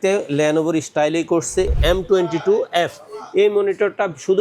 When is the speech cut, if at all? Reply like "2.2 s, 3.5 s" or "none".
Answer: 1.7 s